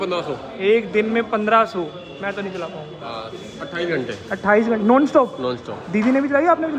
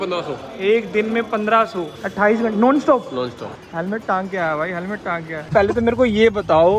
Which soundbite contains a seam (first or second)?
second